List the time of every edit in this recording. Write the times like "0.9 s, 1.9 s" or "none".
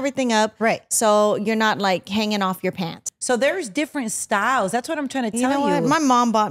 2.9 s